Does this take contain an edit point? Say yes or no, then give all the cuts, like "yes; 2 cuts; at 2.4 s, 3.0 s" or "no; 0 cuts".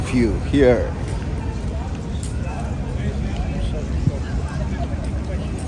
no; 0 cuts